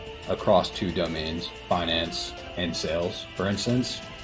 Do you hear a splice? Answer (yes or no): no